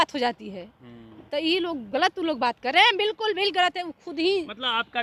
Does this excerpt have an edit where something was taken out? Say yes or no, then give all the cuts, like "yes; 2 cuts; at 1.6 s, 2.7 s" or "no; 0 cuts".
no; 0 cuts